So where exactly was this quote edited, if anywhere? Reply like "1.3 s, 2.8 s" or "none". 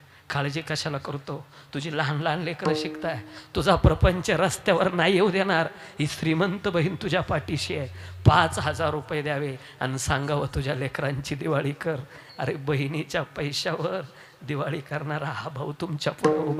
none